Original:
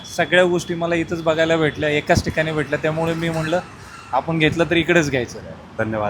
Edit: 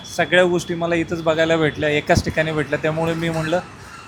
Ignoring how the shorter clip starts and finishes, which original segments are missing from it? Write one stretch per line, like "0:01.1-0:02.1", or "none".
none